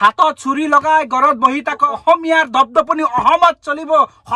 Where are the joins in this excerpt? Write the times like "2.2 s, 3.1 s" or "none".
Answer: 1.9 s